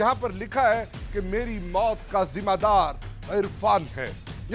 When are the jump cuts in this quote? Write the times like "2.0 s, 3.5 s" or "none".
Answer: none